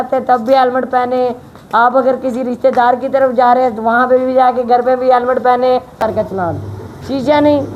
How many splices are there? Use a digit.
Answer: 1